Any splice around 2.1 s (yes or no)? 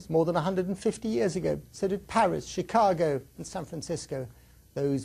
yes